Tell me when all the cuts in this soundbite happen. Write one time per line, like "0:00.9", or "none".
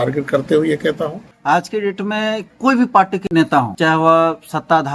0:01.3
0:03.2